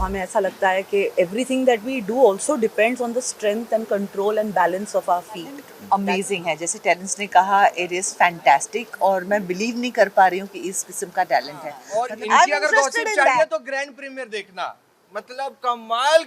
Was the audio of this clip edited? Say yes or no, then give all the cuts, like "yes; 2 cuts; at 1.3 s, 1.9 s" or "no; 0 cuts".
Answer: yes; 2 cuts; at 5.7 s, 11.8 s